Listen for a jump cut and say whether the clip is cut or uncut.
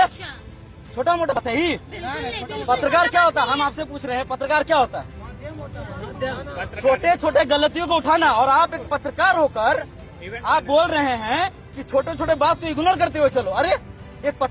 cut